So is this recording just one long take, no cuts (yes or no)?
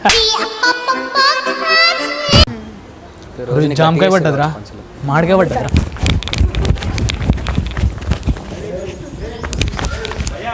no